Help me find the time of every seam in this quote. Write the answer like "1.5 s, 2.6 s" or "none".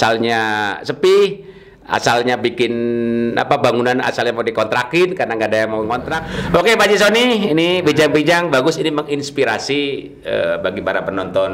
6.2 s